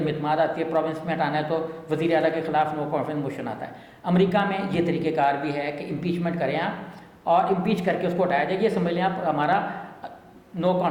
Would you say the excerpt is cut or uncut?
uncut